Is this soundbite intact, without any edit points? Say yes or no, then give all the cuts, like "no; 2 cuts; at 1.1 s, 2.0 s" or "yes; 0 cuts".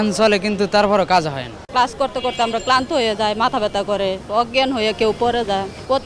no; 1 cut; at 1.6 s